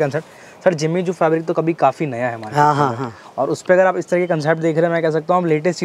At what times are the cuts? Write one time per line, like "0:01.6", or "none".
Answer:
none

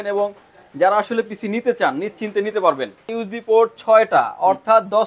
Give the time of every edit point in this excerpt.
0:03.2

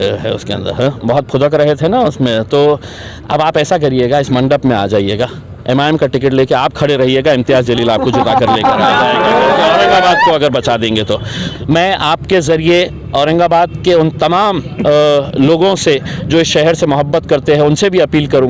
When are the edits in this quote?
0:11.5

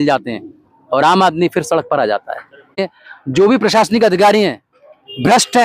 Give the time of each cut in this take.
0:02.8

